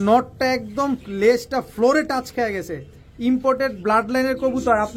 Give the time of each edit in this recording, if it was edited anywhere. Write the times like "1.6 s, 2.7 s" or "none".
none